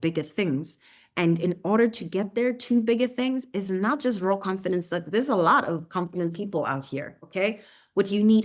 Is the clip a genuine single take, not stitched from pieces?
yes; 0 cuts

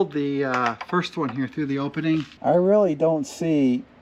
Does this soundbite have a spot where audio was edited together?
yes; 1 cut; at 2.3 s

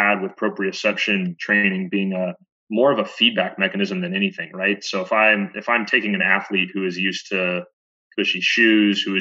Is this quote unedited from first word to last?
no; 2 cuts; at 1.3 s, 2.5 s

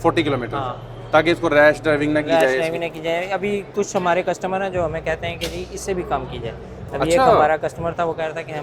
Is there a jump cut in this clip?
no; 0 cuts

